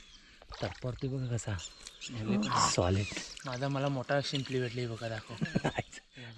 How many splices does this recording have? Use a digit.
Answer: 0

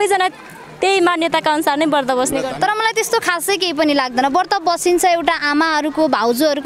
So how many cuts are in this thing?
1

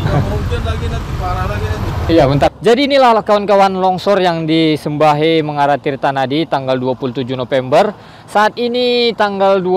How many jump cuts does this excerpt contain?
1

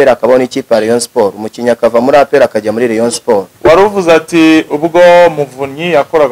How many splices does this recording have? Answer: 1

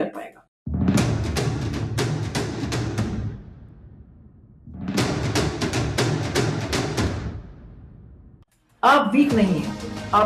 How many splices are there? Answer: 0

